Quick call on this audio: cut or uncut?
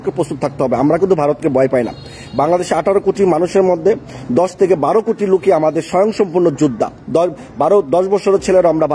uncut